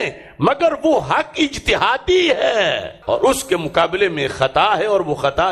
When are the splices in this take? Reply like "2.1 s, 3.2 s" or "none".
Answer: 2.9 s

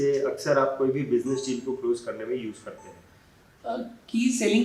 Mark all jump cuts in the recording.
none

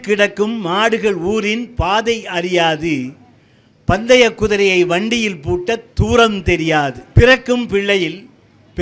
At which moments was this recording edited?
7.0 s

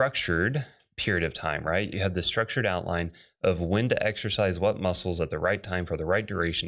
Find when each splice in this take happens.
1.9 s

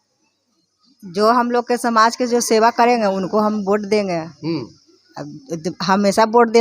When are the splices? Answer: none

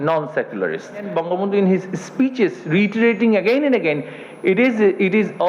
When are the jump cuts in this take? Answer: 1.1 s

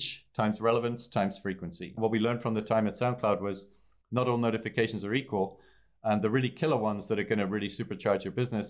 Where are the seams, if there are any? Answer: 1.9 s

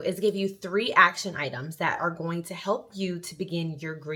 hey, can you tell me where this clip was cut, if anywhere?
none

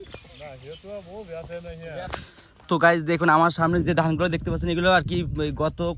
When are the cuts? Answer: 2.1 s

